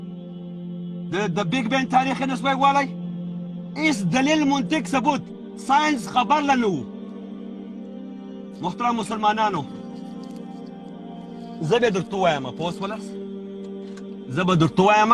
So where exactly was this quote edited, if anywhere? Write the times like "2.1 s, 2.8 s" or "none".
none